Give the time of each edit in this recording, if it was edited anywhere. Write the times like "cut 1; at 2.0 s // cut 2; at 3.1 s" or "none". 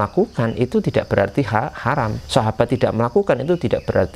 cut 1; at 2.2 s

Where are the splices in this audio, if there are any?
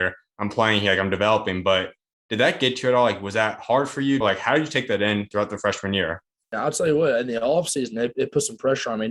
cut 1; at 4.2 s // cut 2; at 6.5 s

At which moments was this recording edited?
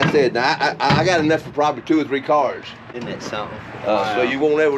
none

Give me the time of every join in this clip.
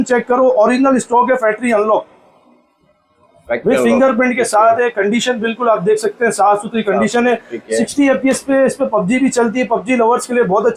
none

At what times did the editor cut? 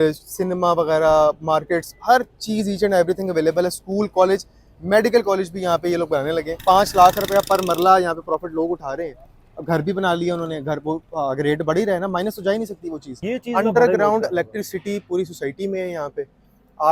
cut 1; at 6.5 s // cut 2; at 13.2 s

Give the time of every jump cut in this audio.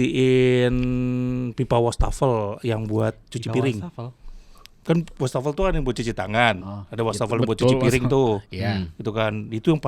none

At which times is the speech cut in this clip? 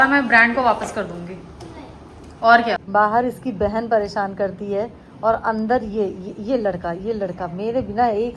cut 1; at 2.8 s

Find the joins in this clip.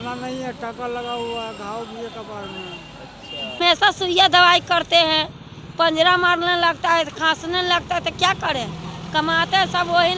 cut 1; at 3.6 s

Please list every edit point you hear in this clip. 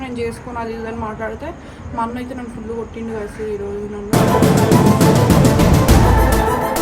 cut 1; at 4.1 s

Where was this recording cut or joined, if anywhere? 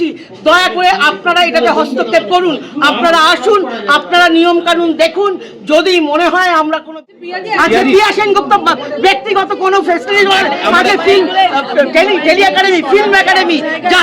cut 1; at 6.9 s

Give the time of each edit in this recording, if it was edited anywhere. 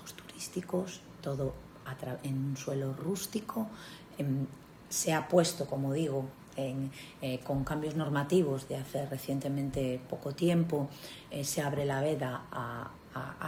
none

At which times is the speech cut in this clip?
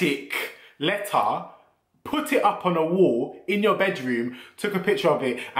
none

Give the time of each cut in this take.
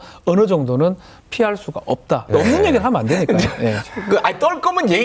cut 1; at 2.2 s

